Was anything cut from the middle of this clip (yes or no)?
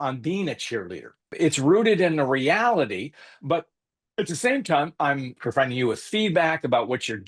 yes